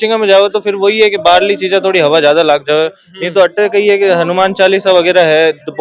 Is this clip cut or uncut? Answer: uncut